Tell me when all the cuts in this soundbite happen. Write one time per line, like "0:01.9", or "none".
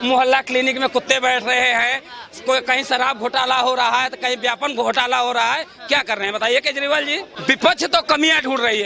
0:07.3